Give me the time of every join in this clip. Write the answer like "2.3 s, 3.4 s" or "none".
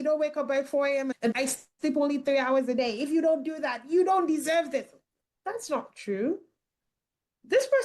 1.2 s